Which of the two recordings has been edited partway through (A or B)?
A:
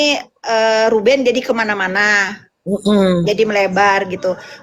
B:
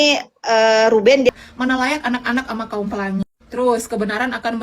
B